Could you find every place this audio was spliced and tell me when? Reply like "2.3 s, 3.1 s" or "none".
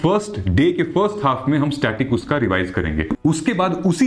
3.2 s